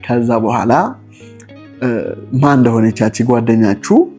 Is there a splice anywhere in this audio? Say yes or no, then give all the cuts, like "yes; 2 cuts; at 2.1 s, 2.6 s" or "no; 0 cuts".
no; 0 cuts